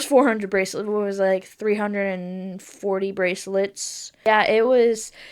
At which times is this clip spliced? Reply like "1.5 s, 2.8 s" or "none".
4.3 s